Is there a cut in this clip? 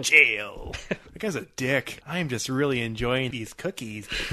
yes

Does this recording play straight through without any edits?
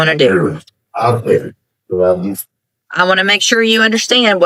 yes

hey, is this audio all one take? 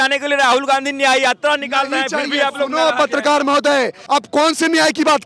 no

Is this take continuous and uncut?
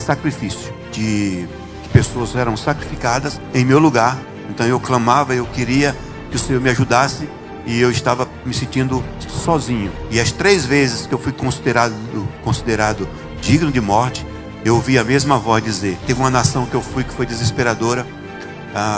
no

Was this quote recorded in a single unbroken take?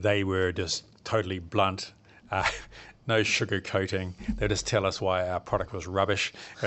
yes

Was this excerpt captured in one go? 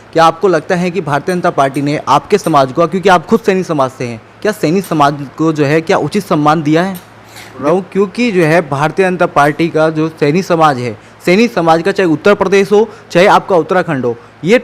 no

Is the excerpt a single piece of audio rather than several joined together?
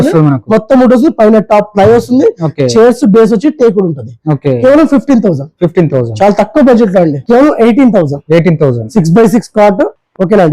no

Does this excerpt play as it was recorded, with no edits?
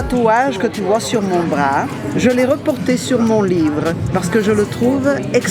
yes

